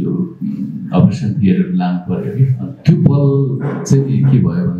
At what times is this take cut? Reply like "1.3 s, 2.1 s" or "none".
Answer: 2.7 s, 3.7 s